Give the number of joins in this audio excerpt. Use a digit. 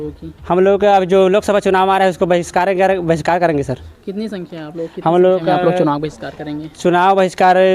0